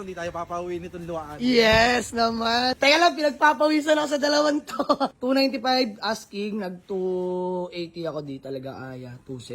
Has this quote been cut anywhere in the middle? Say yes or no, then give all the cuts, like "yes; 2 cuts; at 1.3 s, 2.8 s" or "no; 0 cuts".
yes; 2 cuts; at 2.7 s, 5.2 s